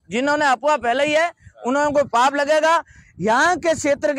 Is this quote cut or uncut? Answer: uncut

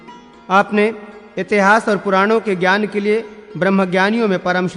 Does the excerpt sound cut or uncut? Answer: uncut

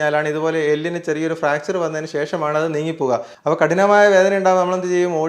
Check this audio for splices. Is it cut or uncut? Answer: cut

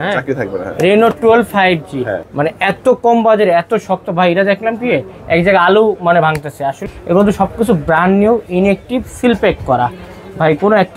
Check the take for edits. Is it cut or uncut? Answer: cut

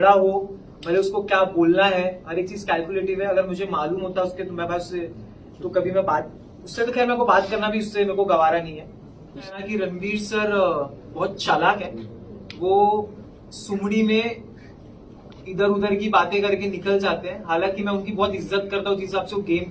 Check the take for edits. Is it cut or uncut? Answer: cut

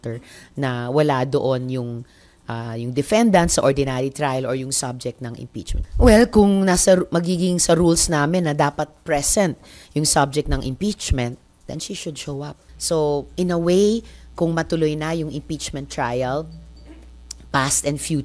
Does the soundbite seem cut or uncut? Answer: cut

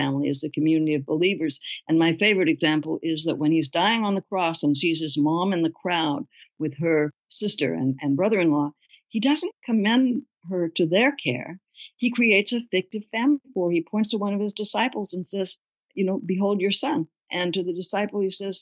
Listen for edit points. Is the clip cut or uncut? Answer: cut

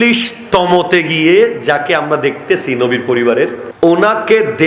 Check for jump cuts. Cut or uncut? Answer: cut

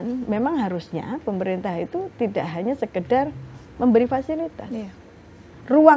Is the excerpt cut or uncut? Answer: uncut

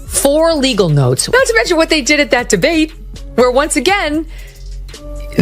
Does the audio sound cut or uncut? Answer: cut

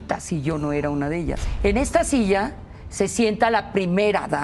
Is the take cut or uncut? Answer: cut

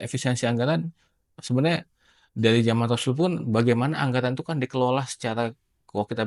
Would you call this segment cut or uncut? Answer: uncut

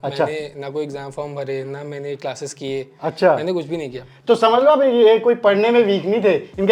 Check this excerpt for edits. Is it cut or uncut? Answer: uncut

